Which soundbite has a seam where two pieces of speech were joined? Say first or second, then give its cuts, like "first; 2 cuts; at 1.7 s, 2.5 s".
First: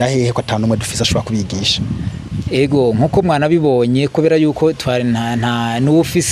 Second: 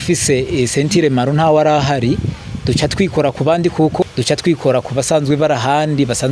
second; 1 cut; at 4.0 s